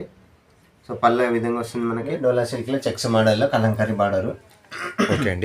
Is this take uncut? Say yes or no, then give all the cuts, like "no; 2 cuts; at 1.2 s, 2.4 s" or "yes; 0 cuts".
no; 1 cut; at 2.2 s